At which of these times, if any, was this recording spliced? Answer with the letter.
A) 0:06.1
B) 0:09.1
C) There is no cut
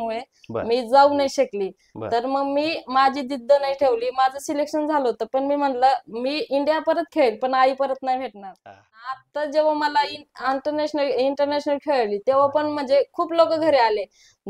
B